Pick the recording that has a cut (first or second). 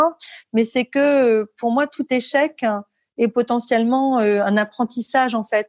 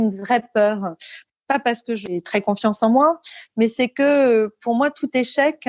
second